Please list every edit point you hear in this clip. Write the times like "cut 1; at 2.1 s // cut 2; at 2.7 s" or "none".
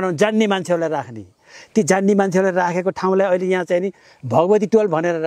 none

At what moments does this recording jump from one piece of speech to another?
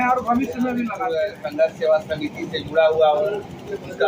cut 1; at 1.0 s

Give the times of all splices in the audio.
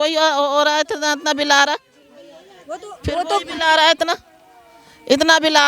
none

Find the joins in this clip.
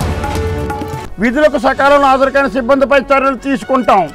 none

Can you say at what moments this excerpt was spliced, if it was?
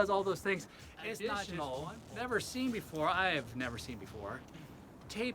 cut 1; at 1.2 s

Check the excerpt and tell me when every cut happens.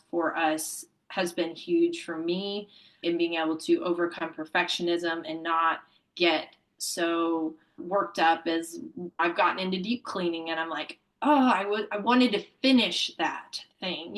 cut 1; at 3.0 s // cut 2; at 9.2 s

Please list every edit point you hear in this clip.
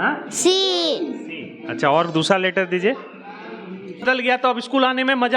cut 1; at 4.0 s

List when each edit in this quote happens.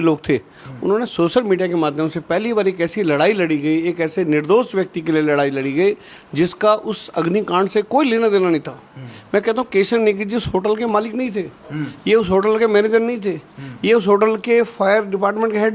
none

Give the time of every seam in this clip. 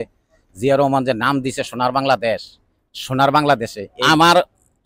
cut 1; at 3.9 s

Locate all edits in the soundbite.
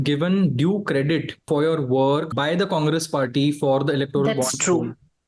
cut 1; at 1.4 s // cut 2; at 2.3 s

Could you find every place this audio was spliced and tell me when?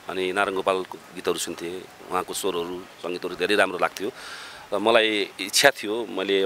none

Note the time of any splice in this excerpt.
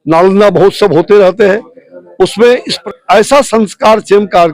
cut 1; at 2.7 s

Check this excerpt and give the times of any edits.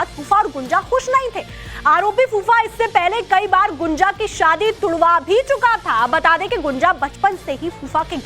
cut 1; at 6.3 s

